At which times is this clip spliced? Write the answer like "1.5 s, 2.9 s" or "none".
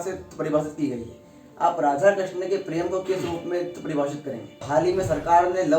4.6 s